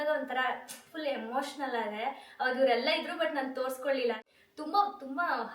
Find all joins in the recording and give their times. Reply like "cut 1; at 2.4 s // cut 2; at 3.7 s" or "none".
cut 1; at 4.3 s